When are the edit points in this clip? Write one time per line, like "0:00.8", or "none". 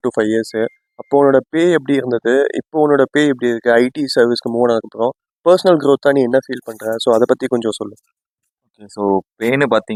none